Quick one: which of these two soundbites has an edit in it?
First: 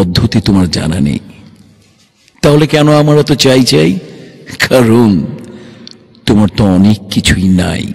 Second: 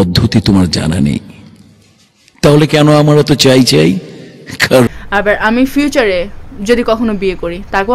second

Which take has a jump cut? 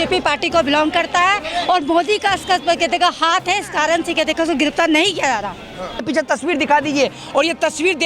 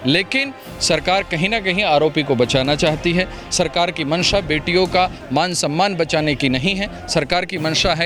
first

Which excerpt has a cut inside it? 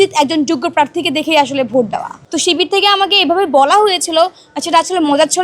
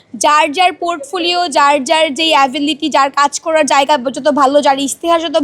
first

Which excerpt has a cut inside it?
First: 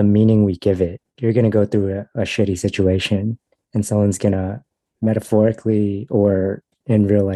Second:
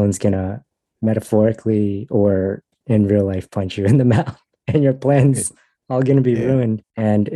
first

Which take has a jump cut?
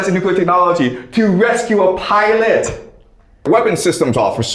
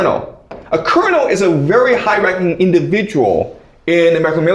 first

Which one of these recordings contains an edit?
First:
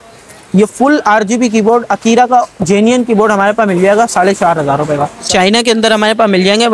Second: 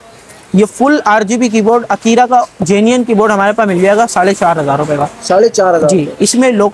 first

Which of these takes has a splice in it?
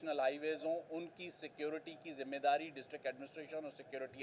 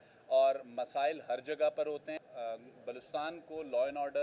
second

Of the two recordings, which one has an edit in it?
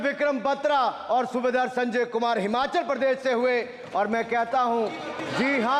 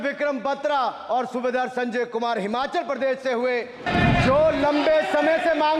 second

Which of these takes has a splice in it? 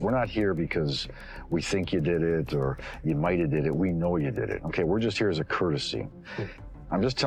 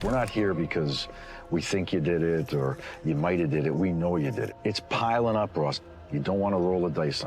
second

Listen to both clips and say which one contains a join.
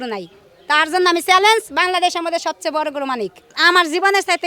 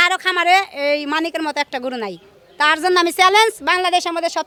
first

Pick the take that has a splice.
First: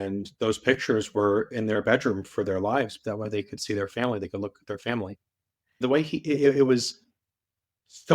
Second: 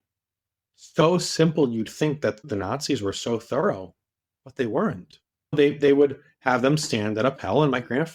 first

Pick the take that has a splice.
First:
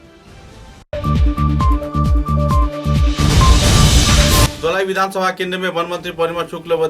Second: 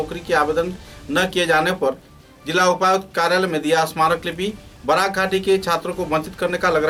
first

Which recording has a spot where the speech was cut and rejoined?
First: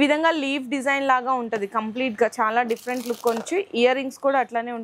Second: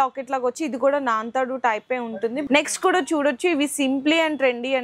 second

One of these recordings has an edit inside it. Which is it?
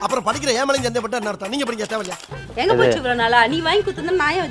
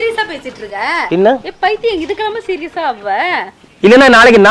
first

